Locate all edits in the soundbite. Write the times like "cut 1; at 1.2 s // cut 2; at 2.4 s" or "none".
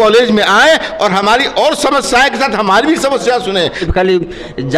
cut 1; at 3.9 s